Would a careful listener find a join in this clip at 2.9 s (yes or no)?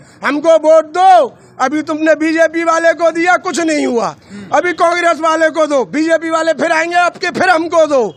no